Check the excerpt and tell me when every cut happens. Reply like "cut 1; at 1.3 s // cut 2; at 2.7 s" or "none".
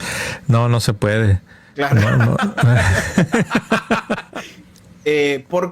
cut 1; at 4.3 s